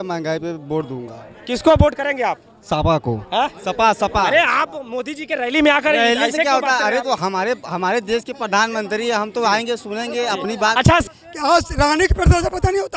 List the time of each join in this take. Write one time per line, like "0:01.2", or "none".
0:11.0